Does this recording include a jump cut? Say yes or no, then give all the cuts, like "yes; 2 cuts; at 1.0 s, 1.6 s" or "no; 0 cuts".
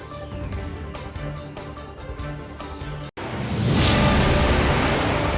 yes; 1 cut; at 3.1 s